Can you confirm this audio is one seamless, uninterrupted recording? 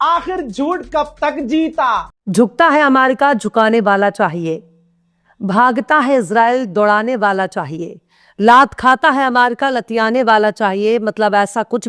no; 1 cut; at 2.1 s

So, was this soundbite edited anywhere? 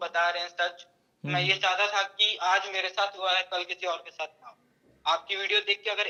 no; 0 cuts

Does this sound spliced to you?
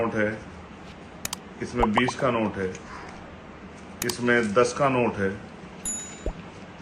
no; 0 cuts

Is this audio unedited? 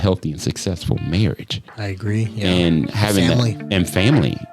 yes; 0 cuts

